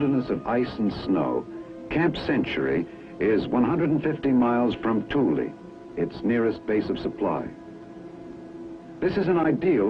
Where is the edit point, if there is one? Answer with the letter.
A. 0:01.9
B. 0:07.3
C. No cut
C